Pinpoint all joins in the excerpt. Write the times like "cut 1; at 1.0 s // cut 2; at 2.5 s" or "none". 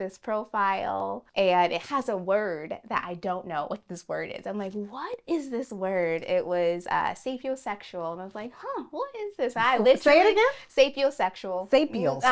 cut 1; at 1.2 s